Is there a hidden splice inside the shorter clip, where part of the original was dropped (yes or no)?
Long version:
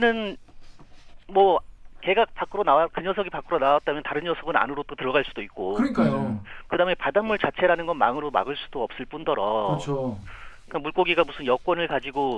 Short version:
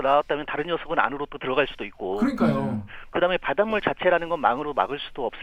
no